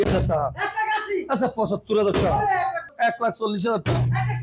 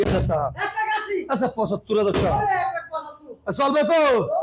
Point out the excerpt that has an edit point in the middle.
first; 1 cut; at 2.9 s

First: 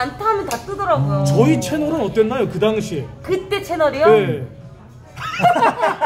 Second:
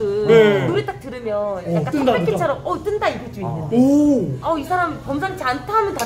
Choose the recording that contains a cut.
second; 1 cut; at 4.4 s

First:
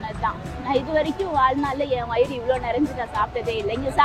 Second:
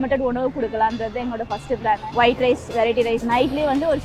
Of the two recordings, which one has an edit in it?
second; 2 cuts; at 2.1 s, 3.2 s

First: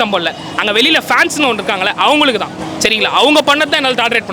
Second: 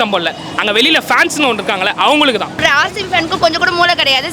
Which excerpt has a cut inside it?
second; 1 cut; at 2.6 s

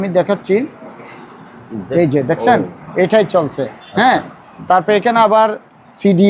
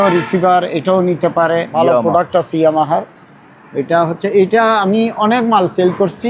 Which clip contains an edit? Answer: second; 1 cut; at 1.7 s

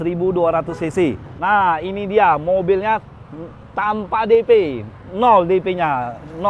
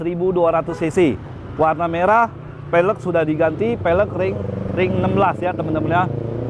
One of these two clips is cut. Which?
first; 1 cut; at 1.3 s

